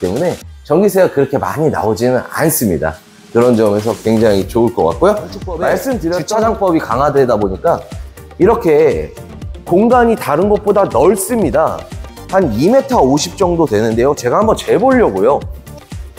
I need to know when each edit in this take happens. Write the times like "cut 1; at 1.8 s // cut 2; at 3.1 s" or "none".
cut 1; at 6.2 s